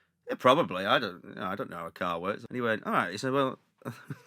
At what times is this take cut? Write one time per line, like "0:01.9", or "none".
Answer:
0:02.4

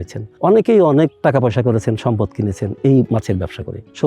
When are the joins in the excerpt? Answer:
0:03.1

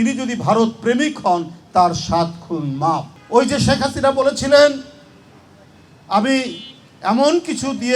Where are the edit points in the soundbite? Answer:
0:03.1

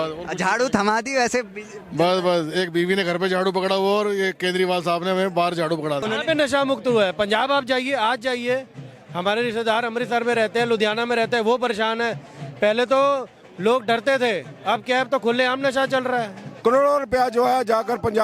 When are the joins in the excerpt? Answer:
0:06.0
0:16.4

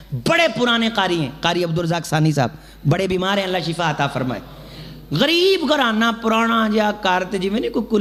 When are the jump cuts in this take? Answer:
none

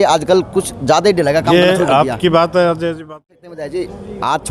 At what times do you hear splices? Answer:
0:03.0

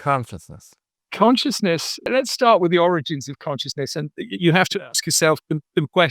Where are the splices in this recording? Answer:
0:01.0
0:02.1

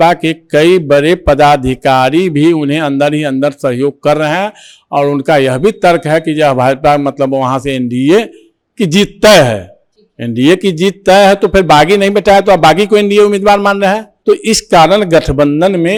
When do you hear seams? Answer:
none

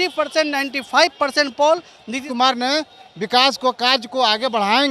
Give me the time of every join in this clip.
0:02.3

